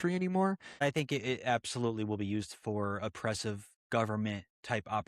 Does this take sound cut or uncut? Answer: cut